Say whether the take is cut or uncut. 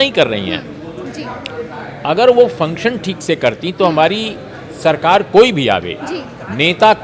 uncut